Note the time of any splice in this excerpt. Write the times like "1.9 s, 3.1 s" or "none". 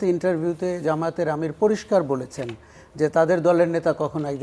none